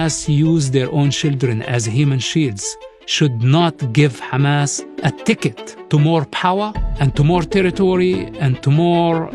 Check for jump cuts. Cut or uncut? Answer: cut